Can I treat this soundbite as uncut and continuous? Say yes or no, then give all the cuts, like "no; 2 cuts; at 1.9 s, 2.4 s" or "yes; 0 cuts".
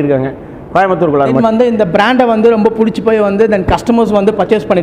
no; 1 cut; at 1.4 s